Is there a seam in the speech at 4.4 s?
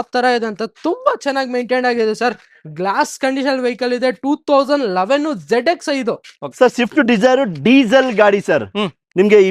no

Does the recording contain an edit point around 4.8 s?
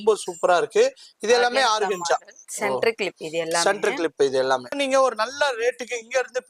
yes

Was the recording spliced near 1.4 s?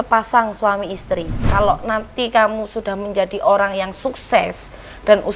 yes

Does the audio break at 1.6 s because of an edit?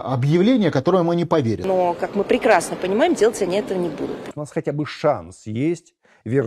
yes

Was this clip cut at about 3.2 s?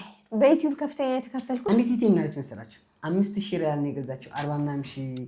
no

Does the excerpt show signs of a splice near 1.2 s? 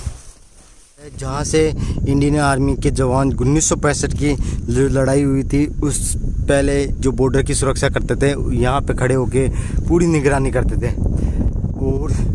yes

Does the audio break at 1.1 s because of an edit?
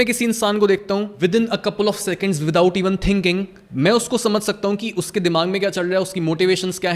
yes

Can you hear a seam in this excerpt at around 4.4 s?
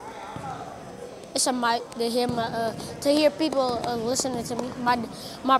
no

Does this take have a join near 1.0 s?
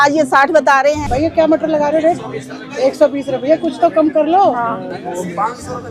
yes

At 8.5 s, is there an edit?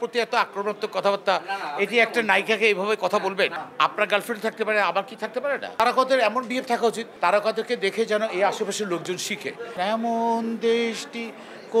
no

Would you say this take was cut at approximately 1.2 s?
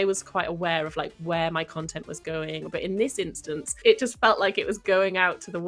no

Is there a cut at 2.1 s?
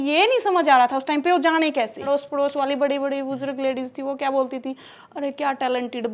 yes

